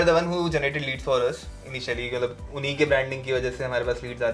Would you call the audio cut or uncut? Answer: uncut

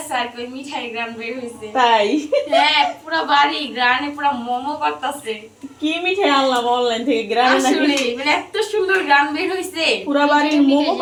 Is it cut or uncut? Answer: uncut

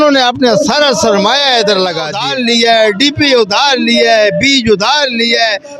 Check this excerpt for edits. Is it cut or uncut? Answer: cut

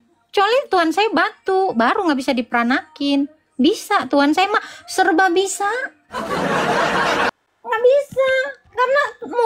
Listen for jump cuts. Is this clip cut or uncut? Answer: cut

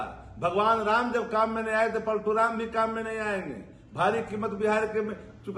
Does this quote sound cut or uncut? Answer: uncut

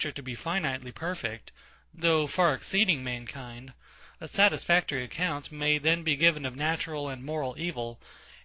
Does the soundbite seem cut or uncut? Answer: cut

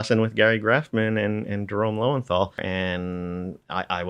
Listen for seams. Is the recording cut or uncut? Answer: cut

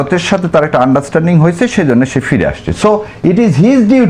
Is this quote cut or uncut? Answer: uncut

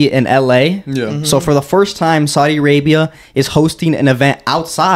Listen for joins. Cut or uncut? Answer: uncut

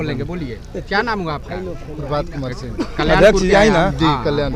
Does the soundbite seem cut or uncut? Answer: uncut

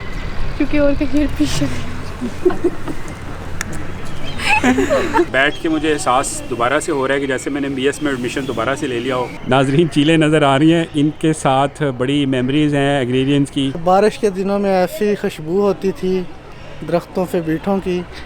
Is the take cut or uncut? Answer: cut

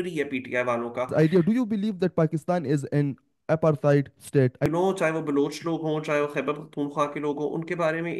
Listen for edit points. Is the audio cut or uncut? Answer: cut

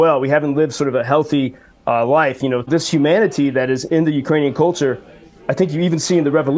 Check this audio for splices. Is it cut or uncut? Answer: cut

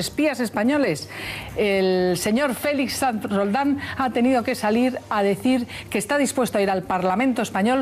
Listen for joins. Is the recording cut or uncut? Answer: uncut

